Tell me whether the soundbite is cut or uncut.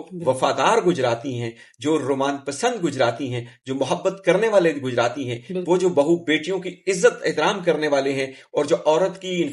uncut